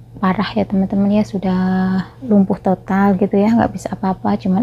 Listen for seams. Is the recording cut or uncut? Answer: uncut